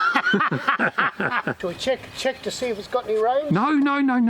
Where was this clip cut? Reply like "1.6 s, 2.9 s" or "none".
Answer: 1.6 s

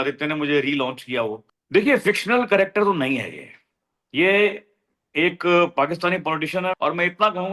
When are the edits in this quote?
1.5 s, 6.8 s

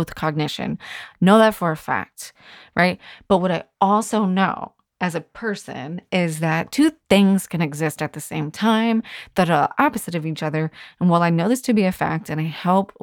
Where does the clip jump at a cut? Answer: none

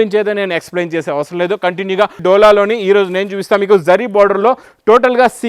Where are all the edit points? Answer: 2.2 s

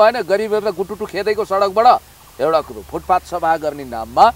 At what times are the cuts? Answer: none

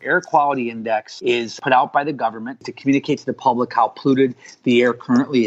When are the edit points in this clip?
1.5 s, 2.7 s

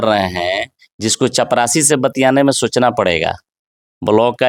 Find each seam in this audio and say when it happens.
none

